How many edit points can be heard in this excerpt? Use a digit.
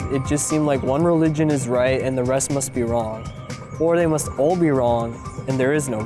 0